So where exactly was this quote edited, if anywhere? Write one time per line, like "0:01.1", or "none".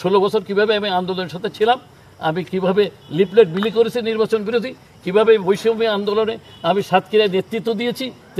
none